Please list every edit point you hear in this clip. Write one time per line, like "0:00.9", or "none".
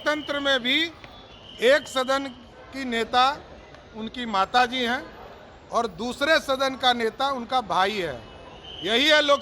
none